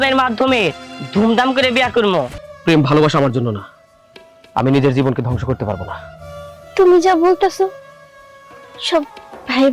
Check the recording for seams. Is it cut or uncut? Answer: cut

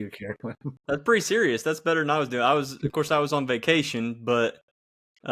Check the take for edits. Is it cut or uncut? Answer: uncut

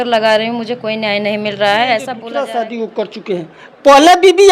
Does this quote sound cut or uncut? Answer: cut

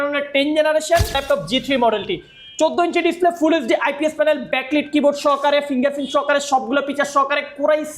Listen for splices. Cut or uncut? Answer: cut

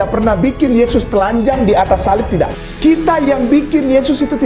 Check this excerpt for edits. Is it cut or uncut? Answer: cut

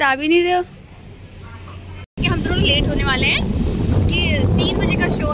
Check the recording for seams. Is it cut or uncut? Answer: cut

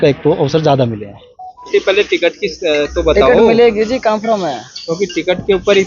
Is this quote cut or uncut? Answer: cut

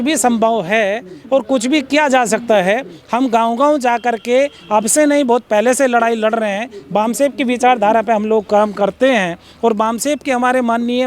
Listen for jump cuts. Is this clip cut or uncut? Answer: uncut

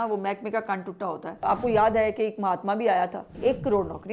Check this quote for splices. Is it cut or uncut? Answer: cut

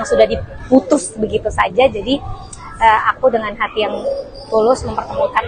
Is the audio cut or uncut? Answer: uncut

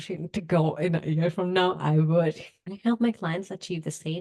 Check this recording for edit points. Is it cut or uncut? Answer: cut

